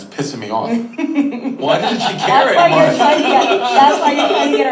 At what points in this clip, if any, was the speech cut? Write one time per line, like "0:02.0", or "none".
0:01.3